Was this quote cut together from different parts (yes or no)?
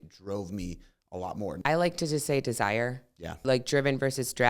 yes